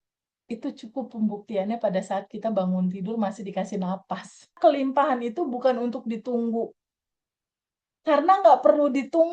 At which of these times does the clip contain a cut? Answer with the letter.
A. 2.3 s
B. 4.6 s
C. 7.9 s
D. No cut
B